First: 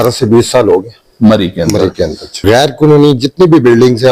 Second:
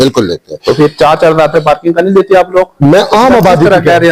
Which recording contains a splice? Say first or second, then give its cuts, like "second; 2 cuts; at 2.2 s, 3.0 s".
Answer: first; 1 cut; at 2.4 s